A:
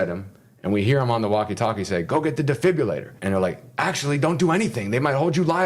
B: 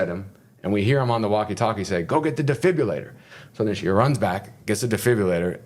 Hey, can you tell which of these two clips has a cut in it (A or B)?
A